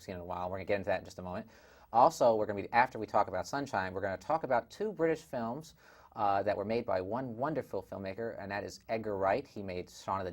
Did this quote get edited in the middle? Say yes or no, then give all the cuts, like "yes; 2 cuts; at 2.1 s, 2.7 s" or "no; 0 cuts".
yes; 1 cut; at 1.3 s